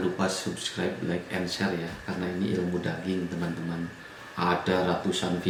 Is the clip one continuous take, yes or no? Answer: yes